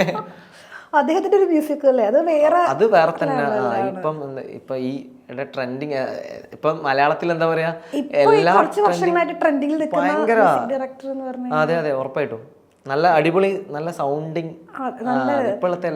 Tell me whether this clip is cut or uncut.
uncut